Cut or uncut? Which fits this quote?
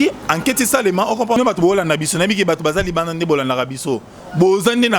cut